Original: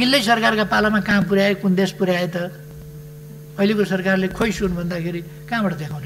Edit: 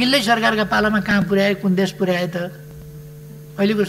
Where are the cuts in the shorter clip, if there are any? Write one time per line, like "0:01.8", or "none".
none